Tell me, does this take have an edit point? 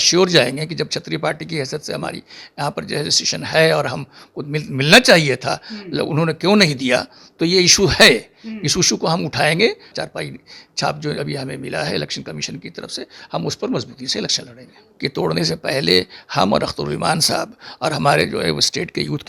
yes; 2 cuts; at 9.9 s, 14.8 s

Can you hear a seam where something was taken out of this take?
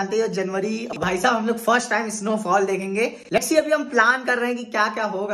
yes; 2 cuts; at 0.9 s, 3.4 s

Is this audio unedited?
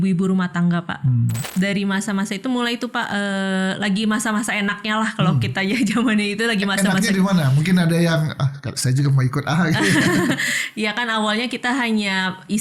no; 1 cut; at 1.4 s

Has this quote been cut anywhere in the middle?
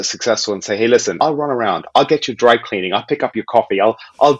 yes; 1 cut; at 1.1 s

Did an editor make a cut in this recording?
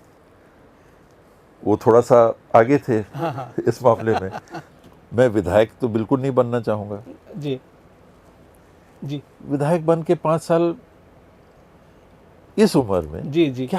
yes; 1 cut; at 4.4 s

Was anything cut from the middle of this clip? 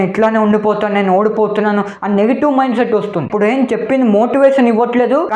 no; 0 cuts

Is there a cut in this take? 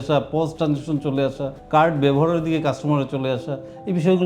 yes; 1 cut; at 1.5 s

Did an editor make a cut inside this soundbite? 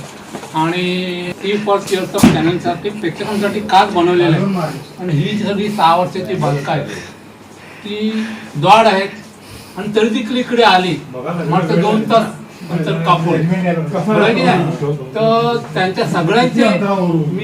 yes; 1 cut; at 1.3 s

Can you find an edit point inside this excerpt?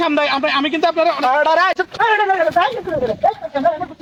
no; 0 cuts

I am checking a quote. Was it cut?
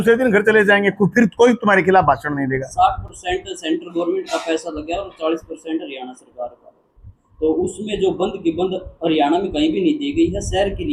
no; 0 cuts

